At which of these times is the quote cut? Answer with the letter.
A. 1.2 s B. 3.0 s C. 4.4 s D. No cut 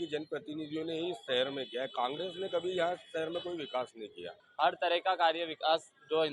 C